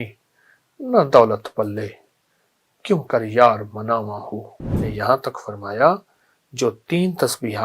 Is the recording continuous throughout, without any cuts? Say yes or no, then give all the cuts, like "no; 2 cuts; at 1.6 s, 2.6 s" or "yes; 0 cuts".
no; 1 cut; at 4.8 s